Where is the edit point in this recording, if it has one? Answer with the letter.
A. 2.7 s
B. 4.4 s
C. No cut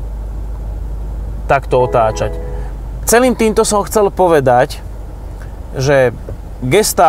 B